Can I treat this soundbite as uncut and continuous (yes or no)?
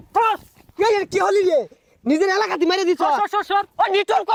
yes